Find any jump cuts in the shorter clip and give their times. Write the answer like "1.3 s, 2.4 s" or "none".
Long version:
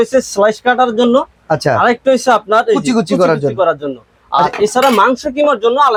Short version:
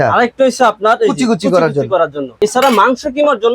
2.3 s